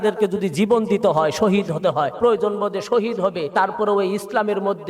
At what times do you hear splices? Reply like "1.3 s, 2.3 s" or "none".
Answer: 2.1 s, 3.5 s